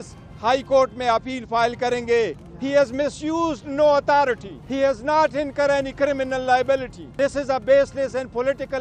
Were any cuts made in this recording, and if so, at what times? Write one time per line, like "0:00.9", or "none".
0:02.5
0:04.5
0:07.0

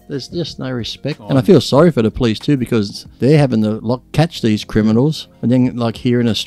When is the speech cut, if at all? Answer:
0:01.2
0:03.0
0:04.1
0:05.3

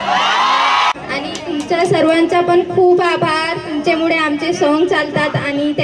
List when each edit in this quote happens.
0:00.9

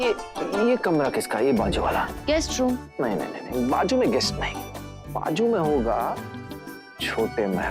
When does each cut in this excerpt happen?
0:02.2

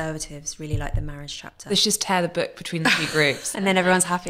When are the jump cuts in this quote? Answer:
0:01.6

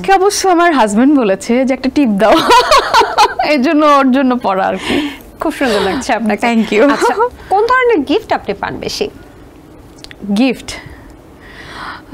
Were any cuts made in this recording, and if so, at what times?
none

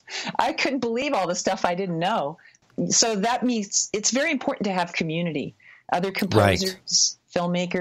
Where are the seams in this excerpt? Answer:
0:02.6

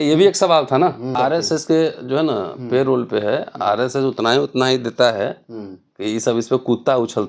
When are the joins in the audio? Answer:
0:01.1

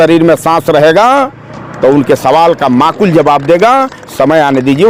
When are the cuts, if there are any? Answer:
none

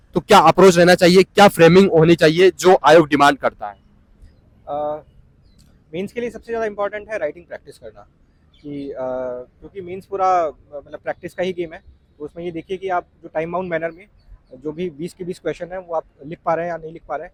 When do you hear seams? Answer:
none

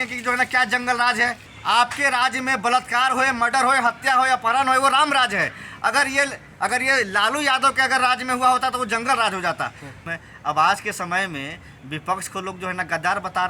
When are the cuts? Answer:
0:01.5
0:10.1

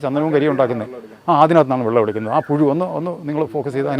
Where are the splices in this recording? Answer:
none

